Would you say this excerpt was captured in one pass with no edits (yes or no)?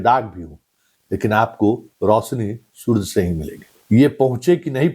no